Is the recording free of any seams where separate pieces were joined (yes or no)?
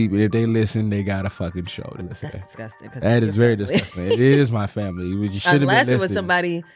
no